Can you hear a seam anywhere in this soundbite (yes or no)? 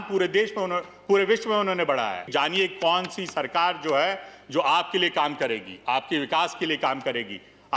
yes